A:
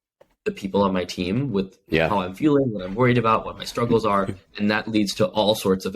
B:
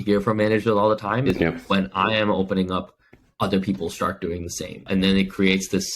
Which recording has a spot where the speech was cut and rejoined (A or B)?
B